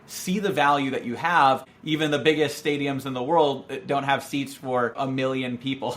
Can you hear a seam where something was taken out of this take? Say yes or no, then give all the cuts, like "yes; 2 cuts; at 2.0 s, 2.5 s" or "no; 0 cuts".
yes; 1 cut; at 1.7 s